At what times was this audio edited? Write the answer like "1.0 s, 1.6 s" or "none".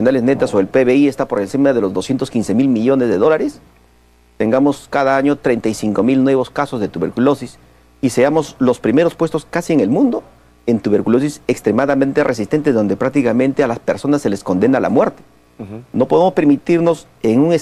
13.5 s